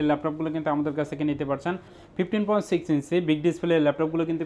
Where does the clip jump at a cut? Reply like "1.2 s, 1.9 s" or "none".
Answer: 2.0 s

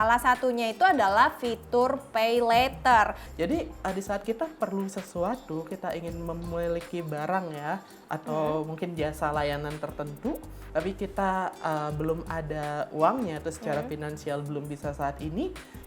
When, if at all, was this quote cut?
3.2 s

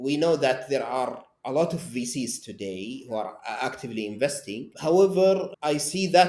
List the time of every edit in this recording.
none

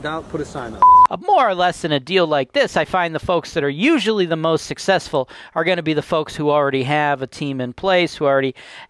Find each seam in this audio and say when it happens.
1.2 s

